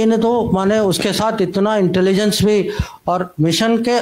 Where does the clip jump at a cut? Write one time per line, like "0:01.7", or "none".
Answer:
none